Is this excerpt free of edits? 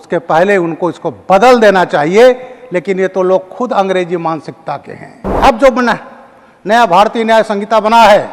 no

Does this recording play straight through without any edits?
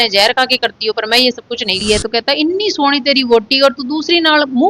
no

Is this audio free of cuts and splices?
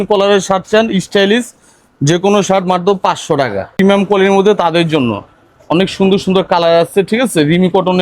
no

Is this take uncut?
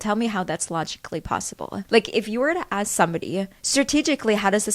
no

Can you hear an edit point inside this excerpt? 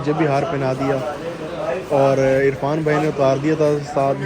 no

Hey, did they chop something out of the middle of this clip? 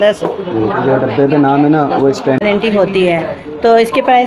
yes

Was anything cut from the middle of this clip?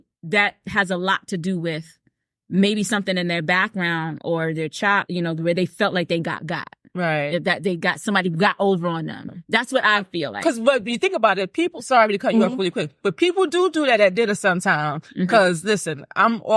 yes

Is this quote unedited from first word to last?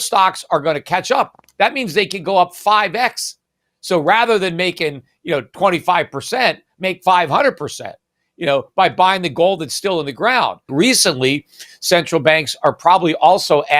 no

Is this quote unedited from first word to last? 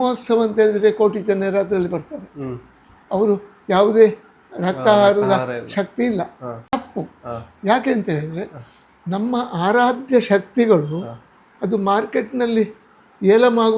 no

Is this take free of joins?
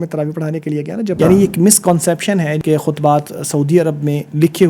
no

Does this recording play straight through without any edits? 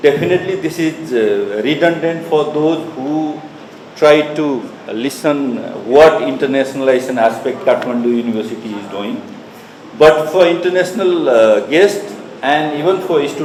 yes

